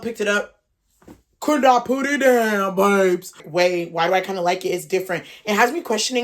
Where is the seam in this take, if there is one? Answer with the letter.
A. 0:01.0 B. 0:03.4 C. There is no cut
B